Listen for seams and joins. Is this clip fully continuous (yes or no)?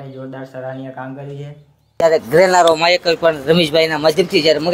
no